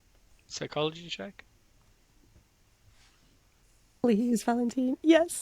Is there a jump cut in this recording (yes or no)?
yes